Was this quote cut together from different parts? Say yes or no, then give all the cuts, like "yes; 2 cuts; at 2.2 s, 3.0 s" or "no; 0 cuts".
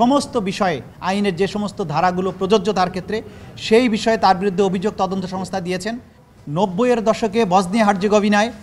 yes; 1 cut; at 6.2 s